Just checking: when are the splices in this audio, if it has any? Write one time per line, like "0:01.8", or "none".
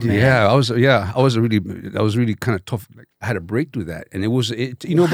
0:03.1